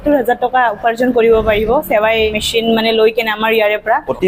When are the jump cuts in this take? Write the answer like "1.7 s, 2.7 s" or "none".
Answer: none